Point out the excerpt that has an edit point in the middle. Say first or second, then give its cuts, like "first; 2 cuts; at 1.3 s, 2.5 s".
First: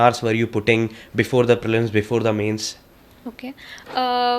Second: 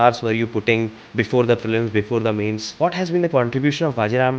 second; 1 cut; at 2.7 s